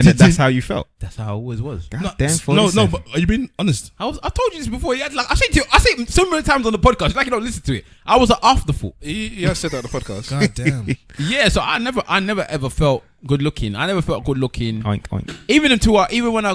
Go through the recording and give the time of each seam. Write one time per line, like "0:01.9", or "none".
0:10.8